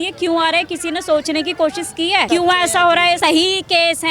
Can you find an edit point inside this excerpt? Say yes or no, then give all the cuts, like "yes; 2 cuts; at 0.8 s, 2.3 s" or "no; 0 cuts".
yes; 2 cuts; at 2.3 s, 3.2 s